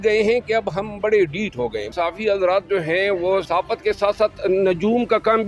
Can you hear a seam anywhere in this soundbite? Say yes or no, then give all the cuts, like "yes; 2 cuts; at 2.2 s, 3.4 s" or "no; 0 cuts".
yes; 2 cuts; at 1.9 s, 3.5 s